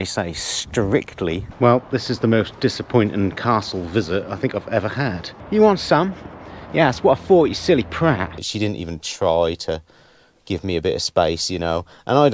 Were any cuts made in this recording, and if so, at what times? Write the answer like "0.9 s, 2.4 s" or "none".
1.5 s, 5.4 s, 8.4 s